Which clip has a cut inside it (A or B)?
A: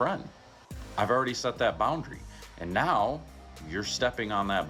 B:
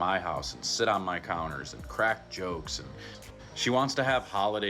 B